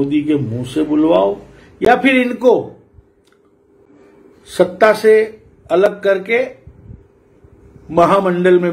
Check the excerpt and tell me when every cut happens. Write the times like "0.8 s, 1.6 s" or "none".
none